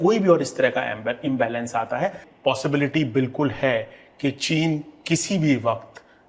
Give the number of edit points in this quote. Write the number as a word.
one